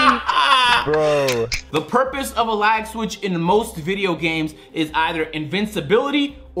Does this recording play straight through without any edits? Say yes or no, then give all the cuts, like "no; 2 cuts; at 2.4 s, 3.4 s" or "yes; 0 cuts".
no; 1 cut; at 1.6 s